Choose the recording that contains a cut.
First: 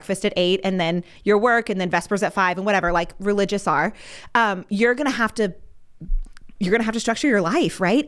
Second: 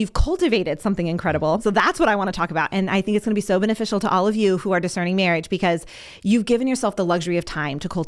second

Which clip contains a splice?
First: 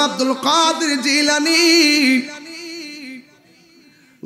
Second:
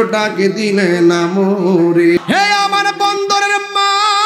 second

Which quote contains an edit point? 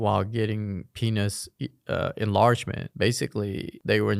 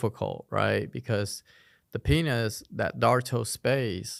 first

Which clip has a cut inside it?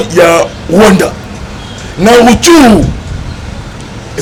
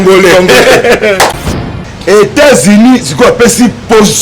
second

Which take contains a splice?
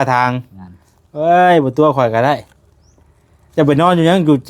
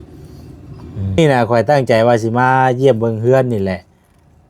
second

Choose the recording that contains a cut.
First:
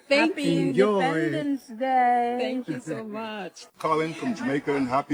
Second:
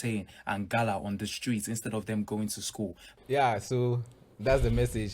second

